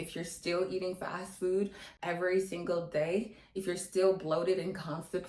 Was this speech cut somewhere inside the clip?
no; 0 cuts

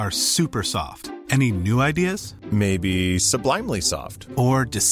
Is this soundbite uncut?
yes; 0 cuts

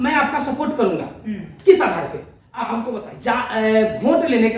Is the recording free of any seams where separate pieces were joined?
no; 1 cut; at 2.8 s

